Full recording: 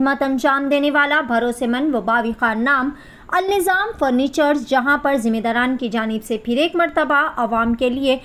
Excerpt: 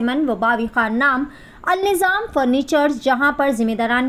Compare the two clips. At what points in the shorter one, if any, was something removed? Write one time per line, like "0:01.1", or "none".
none